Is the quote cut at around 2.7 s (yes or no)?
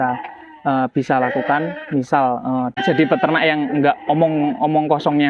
yes